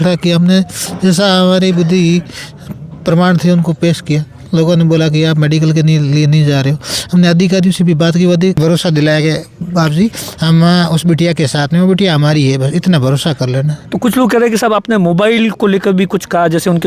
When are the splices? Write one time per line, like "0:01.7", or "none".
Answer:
0:08.6